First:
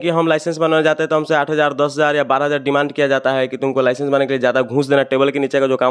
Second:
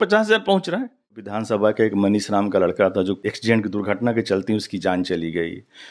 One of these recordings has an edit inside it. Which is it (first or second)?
second